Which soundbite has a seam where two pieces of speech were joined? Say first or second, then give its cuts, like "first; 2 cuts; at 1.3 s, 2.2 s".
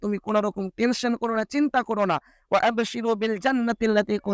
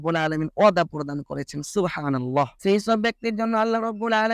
second; 1 cut; at 2.5 s